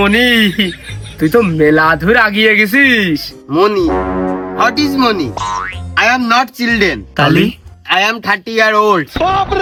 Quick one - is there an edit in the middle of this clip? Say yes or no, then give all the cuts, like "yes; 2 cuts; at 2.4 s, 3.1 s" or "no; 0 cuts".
no; 0 cuts